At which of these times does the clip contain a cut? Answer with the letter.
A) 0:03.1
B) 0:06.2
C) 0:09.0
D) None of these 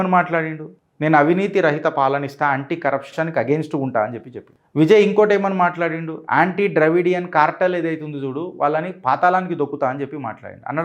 A